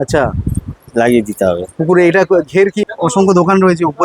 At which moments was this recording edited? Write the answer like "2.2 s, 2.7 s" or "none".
2.8 s